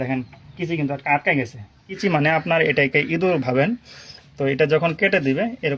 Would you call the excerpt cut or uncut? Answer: cut